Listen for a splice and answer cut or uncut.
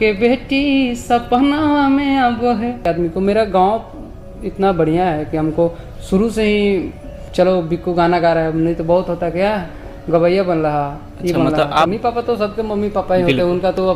cut